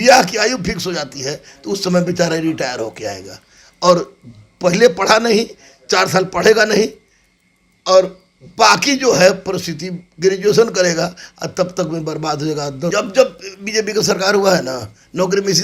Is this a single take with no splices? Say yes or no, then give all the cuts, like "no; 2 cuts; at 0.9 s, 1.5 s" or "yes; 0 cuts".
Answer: no; 1 cut; at 12.9 s